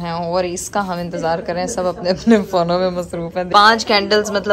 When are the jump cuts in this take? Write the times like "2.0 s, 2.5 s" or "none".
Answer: 3.5 s